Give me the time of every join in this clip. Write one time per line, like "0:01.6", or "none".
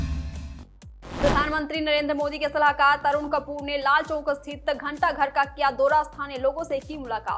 0:01.2